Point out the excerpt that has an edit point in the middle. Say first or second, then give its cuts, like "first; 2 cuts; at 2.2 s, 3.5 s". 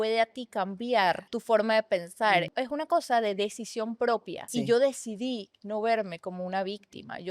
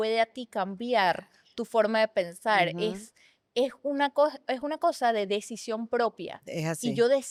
first; 3 cuts; at 1.3 s, 2.5 s, 4.5 s